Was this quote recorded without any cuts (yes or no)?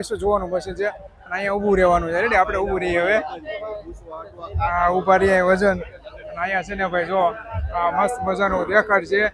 yes